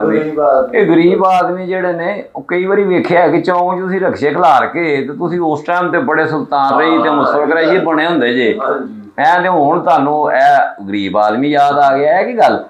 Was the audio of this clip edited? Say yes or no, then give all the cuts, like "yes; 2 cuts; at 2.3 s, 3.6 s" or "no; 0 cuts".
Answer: no; 0 cuts